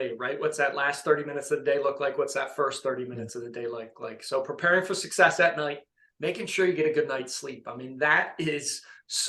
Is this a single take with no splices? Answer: yes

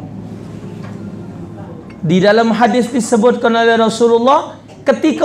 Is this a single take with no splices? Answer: no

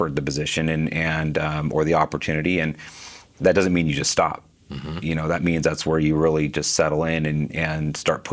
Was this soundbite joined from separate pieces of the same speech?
no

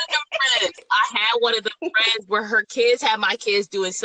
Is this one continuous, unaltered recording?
yes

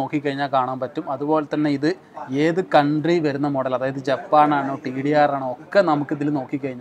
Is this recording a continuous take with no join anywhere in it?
yes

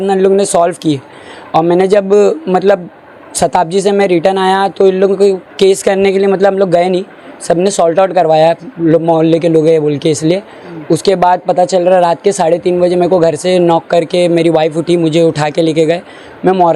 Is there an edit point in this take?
no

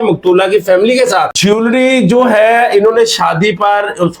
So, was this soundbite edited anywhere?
yes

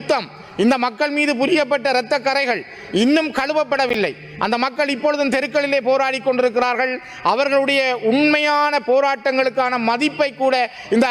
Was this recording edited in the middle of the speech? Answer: no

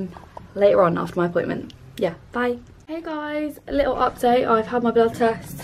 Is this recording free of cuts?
no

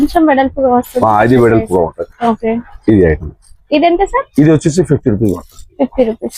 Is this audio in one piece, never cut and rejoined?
yes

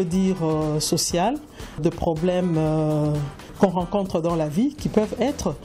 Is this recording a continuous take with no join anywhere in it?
no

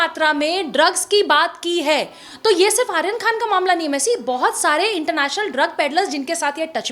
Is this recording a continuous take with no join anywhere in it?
yes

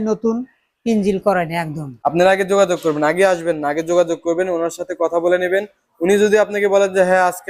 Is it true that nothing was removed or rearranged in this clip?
no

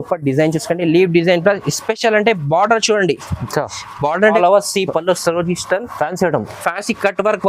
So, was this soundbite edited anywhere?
yes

